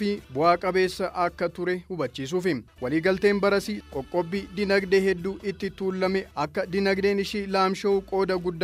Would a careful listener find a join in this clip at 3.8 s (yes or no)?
yes